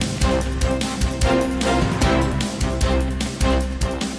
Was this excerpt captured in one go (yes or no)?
no